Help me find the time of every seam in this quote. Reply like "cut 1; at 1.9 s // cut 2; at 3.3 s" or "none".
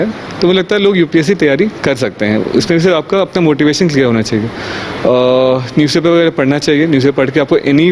none